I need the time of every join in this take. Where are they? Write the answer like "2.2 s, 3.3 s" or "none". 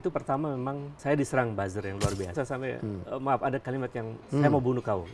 2.3 s, 4.2 s